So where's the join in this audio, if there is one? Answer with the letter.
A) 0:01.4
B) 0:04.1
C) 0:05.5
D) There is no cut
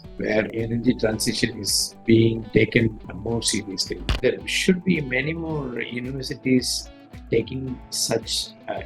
B